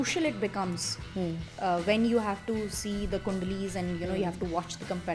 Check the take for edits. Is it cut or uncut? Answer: uncut